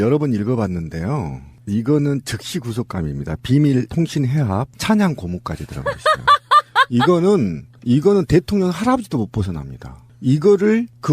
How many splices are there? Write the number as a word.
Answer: zero